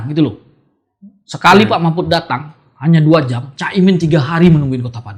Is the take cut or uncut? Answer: uncut